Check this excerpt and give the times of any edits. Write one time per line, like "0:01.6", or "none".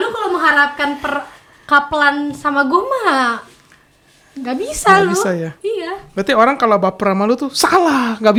none